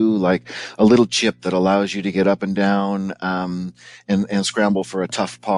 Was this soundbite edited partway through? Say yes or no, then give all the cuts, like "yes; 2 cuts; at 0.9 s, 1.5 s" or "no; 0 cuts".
no; 0 cuts